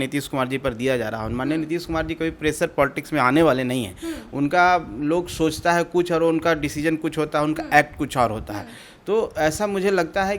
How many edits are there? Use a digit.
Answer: 0